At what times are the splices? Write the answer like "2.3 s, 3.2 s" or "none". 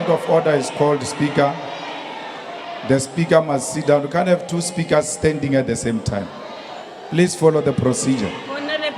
6.6 s